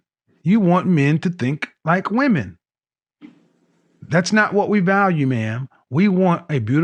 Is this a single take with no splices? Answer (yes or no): yes